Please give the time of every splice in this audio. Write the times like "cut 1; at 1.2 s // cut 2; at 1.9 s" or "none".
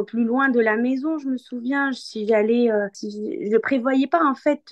none